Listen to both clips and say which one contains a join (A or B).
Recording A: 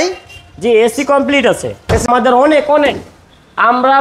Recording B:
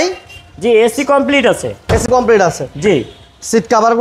A